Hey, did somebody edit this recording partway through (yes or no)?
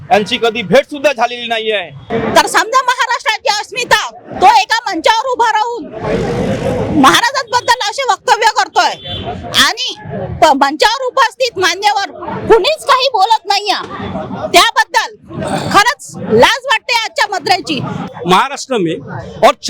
yes